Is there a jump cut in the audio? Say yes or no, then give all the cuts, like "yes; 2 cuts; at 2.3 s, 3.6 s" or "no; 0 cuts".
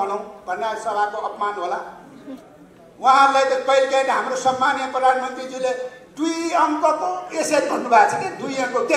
no; 0 cuts